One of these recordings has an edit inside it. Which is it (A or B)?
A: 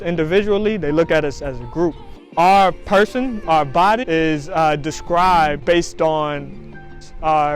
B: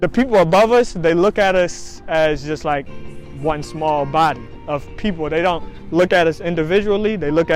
A